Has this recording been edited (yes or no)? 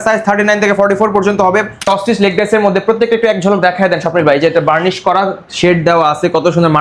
yes